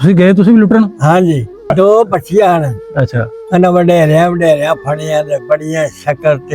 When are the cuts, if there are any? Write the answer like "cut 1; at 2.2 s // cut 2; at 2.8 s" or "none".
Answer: cut 1; at 1.7 s